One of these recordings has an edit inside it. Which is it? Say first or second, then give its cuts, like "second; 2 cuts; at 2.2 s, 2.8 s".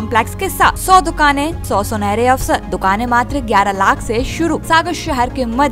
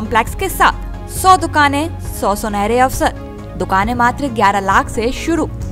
first; 4 cuts; at 0.8 s, 1.6 s, 2.7 s, 4.6 s